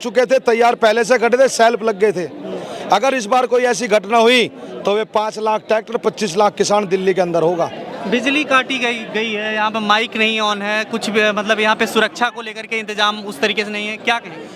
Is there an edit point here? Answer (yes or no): no